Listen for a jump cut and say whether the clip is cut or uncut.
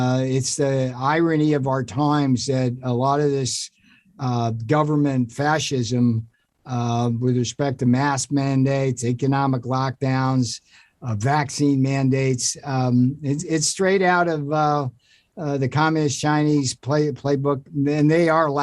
uncut